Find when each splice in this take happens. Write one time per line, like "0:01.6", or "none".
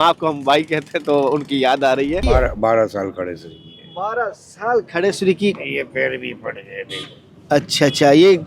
0:02.2